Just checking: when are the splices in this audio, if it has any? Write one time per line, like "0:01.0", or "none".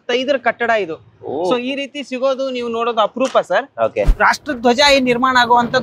0:04.1

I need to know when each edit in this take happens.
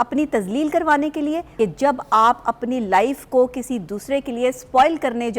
0:01.5

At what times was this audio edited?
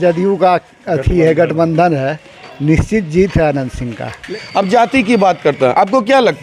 0:04.2

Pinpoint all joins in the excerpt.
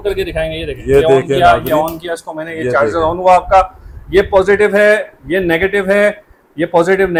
none

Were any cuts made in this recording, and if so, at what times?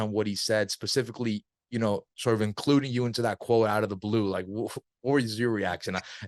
none

